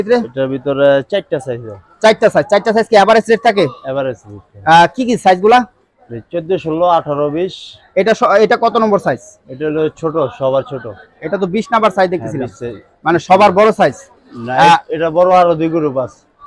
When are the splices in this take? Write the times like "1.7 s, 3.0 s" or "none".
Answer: none